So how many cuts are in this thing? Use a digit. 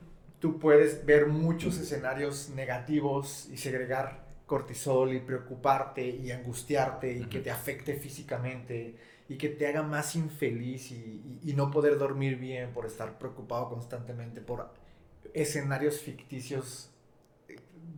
0